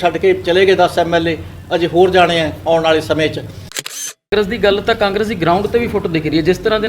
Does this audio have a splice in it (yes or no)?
yes